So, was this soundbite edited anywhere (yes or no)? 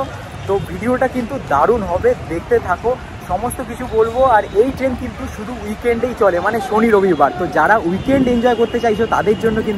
no